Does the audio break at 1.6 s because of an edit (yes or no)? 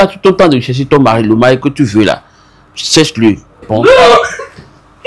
no